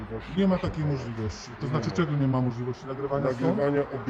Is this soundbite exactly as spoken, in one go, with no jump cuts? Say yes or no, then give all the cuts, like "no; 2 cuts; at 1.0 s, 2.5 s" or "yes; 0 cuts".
yes; 0 cuts